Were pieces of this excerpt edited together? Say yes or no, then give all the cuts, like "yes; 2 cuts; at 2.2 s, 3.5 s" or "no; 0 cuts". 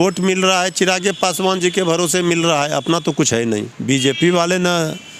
yes; 1 cut; at 3.7 s